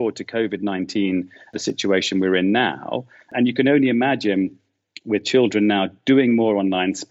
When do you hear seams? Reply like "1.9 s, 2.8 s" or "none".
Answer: 1.5 s, 3.3 s